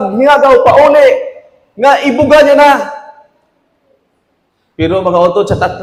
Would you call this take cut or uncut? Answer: uncut